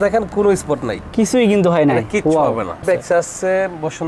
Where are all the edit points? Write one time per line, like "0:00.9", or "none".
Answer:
0:02.8